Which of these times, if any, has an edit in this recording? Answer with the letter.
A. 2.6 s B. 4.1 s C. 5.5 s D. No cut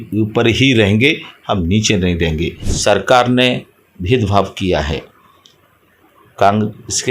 A